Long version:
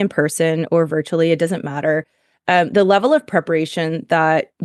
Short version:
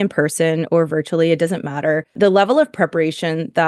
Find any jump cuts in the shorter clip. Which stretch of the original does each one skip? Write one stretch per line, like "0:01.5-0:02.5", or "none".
0:02.1-0:02.7